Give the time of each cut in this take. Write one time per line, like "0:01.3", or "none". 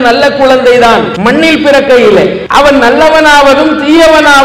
0:01.1
0:02.4

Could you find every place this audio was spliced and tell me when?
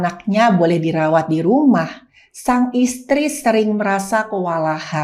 none

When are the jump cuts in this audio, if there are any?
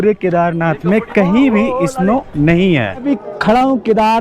0:03.0

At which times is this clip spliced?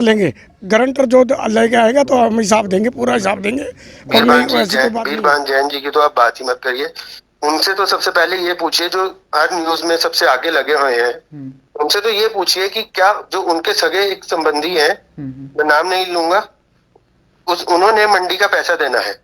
0:04.7

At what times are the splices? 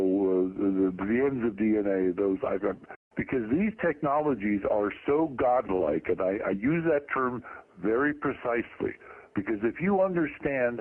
none

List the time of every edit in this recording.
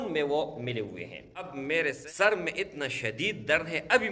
0:01.5

